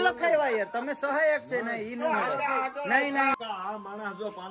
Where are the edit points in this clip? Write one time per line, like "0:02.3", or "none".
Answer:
0:03.3